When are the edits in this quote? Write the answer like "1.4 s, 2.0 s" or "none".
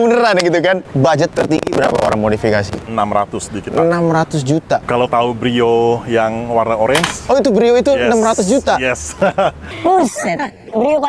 1.1 s, 2.9 s, 4.8 s